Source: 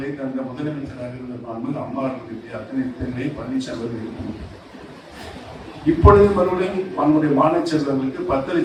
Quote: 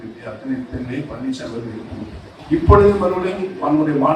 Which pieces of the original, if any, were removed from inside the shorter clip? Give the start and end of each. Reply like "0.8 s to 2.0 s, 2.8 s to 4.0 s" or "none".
4.6 s to 5.6 s

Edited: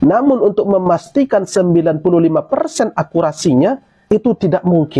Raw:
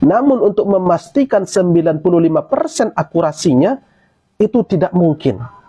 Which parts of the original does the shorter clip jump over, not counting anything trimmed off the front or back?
3.9 s to 4.2 s

